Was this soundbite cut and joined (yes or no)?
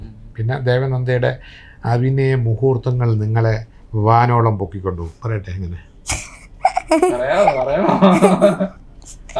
no